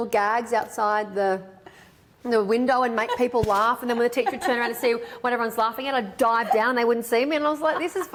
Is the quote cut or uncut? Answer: uncut